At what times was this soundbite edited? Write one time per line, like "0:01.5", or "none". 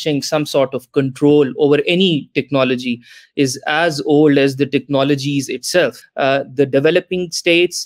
0:06.0